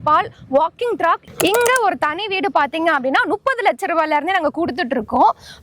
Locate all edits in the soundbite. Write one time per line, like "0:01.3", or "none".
0:01.3